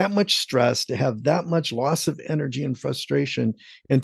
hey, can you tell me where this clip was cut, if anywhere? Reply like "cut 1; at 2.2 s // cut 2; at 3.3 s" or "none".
none